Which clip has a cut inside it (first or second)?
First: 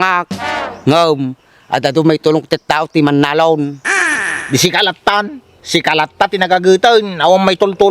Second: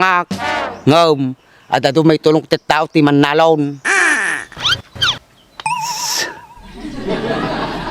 first